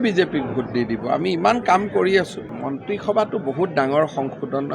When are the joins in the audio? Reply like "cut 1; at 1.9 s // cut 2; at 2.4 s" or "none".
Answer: cut 1; at 2.4 s